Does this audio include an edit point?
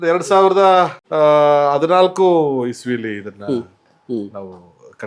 yes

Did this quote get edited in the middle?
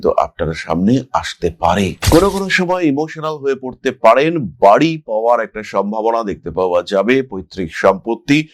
yes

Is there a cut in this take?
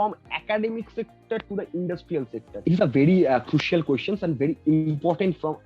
yes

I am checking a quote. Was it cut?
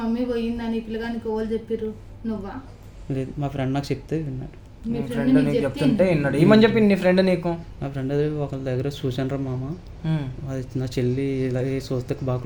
no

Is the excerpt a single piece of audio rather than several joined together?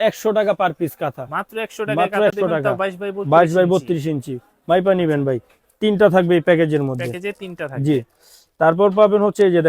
yes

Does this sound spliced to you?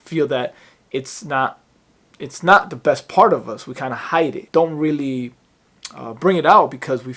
yes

